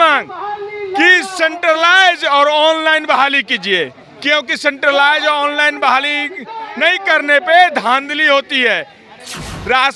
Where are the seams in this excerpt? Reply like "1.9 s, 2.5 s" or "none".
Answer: none